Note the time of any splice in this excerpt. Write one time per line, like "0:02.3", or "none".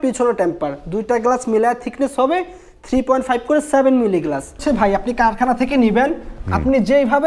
0:04.6